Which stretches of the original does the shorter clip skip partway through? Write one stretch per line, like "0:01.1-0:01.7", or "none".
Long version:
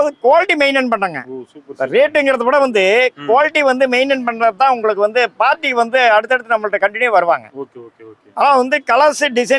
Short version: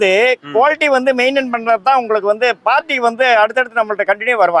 none